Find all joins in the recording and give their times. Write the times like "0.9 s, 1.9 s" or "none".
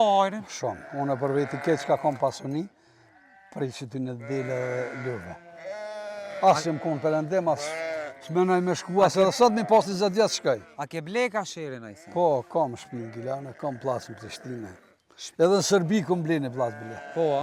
none